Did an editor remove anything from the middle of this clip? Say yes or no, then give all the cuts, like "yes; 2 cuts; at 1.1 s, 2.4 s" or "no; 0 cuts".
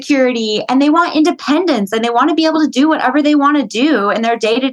no; 0 cuts